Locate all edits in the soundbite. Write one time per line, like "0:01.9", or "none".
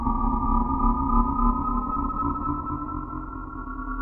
none

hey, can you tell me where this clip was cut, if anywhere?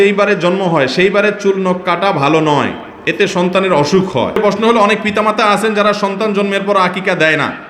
0:04.4

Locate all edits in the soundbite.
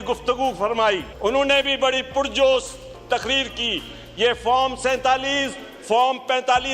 0:01.1

